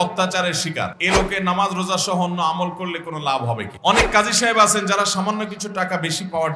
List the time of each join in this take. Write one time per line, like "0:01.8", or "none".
0:01.0
0:03.7

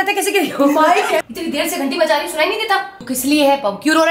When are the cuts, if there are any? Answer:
0:01.2
0:03.0

